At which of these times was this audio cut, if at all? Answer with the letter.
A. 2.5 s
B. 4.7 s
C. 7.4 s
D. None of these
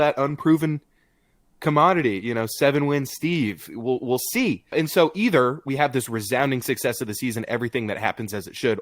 B